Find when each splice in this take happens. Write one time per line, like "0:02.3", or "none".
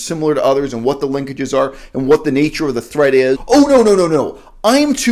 0:03.4